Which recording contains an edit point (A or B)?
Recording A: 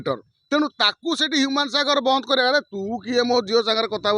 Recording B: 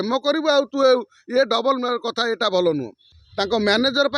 B